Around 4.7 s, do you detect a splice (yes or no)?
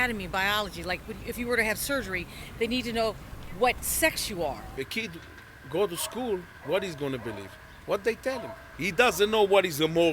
yes